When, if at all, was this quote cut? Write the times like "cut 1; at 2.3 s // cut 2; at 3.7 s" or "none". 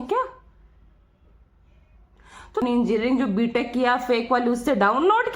cut 1; at 2.6 s